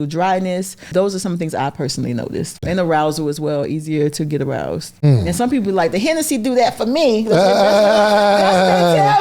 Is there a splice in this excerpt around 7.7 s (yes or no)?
no